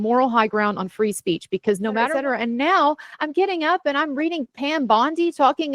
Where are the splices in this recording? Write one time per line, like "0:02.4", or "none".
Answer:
0:02.1